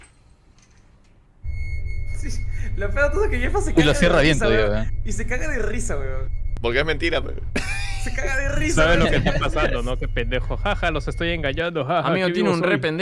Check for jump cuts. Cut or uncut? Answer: uncut